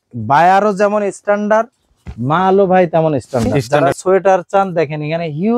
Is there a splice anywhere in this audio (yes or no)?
yes